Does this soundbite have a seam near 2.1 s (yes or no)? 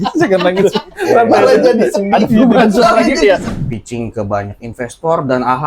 no